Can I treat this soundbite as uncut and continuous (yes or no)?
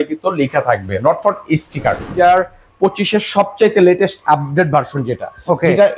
no